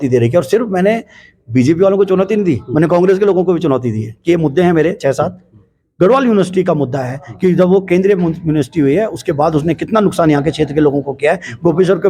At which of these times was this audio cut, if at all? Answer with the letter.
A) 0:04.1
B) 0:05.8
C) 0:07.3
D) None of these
D